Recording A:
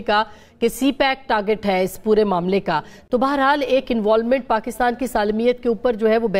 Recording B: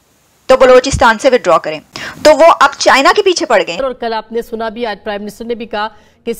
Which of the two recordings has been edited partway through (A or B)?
B